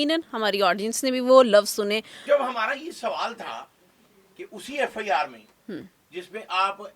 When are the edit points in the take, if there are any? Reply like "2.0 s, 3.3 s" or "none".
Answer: 2.1 s